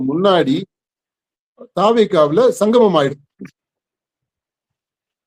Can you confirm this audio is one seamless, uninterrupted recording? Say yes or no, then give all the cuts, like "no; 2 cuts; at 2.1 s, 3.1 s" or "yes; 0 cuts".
yes; 0 cuts